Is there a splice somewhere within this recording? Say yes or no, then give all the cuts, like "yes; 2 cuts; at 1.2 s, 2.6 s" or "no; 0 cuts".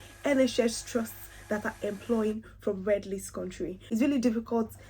yes; 1 cut; at 3.8 s